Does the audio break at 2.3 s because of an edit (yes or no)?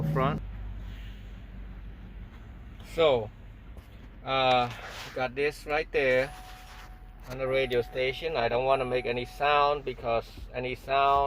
yes